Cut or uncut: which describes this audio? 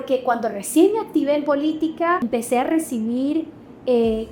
cut